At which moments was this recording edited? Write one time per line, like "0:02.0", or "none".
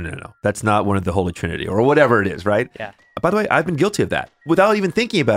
0:03.0
0:04.4